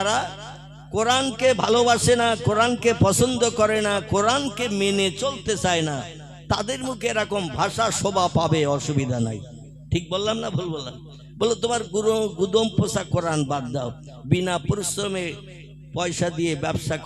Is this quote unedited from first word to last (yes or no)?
yes